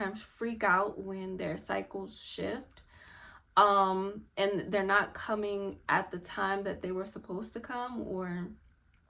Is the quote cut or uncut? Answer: uncut